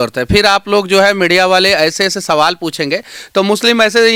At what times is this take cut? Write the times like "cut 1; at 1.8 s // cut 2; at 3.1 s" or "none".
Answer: none